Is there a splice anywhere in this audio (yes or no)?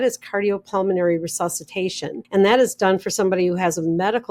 yes